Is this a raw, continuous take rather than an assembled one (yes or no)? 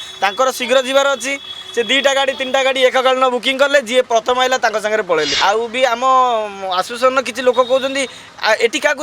no